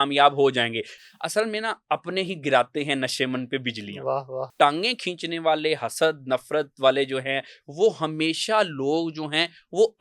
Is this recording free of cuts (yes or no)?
no